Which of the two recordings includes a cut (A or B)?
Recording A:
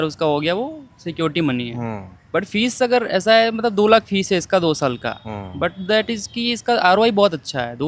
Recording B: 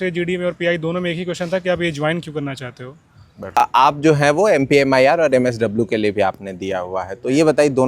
B